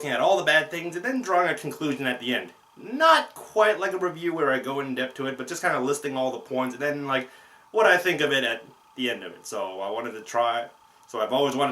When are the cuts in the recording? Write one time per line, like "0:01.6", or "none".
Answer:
0:02.8